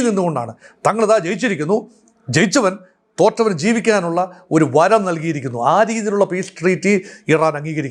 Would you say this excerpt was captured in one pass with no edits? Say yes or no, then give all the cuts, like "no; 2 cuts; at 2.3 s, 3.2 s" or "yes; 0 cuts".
yes; 0 cuts